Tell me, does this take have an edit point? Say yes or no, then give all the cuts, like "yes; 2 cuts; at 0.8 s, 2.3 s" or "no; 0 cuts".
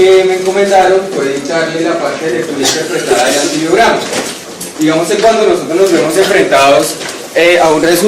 yes; 1 cut; at 3.3 s